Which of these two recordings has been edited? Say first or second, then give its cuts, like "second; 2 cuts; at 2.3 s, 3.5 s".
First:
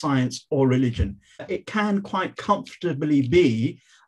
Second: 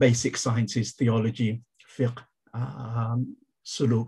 first; 1 cut; at 1.5 s